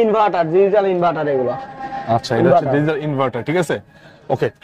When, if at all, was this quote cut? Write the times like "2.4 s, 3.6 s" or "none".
none